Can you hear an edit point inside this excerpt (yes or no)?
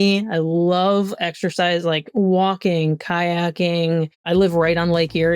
yes